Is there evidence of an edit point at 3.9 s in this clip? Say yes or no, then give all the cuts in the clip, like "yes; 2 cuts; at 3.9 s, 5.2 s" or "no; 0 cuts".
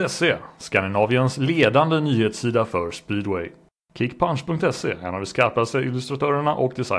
yes; 1 cut; at 3.9 s